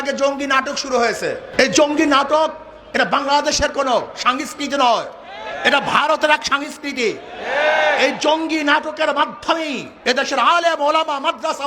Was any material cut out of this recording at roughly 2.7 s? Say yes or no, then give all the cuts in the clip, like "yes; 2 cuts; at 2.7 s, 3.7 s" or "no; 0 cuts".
no; 1 cut; at 1.5 s